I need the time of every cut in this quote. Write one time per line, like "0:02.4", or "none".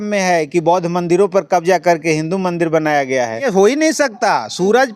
0:03.4